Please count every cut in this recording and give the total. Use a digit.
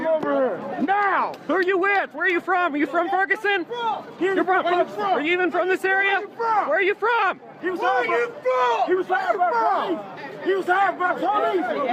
0